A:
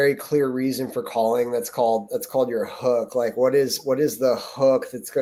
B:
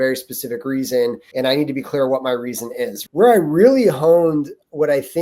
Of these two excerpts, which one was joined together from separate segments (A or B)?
B